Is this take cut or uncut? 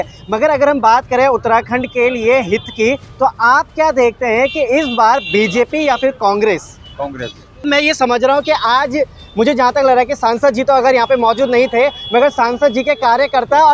cut